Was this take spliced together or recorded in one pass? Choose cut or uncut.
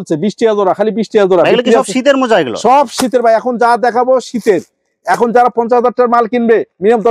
uncut